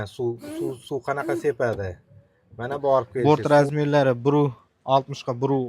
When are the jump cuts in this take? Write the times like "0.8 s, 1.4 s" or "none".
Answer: 3.1 s

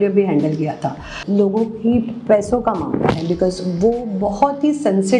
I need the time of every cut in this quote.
1.1 s

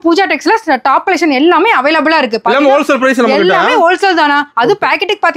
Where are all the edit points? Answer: none

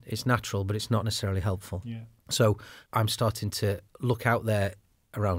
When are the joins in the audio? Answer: 1.7 s, 2.7 s

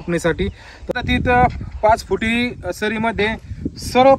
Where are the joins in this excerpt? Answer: 0.9 s

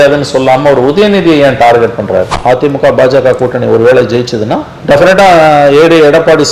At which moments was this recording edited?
2.3 s

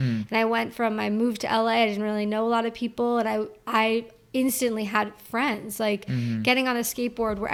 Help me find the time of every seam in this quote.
none

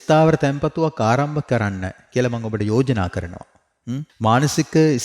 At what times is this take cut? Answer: 4.1 s

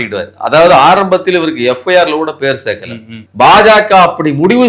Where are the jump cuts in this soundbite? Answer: 3.2 s

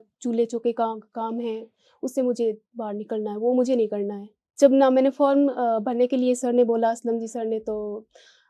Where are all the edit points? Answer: 4.5 s

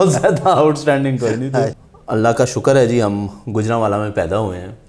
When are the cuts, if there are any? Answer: 1.8 s

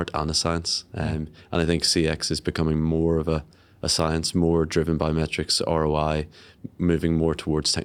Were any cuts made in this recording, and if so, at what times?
none

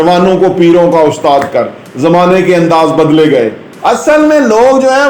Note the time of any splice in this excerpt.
3.6 s

